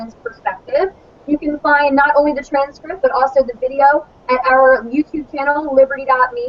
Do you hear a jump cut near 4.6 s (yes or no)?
yes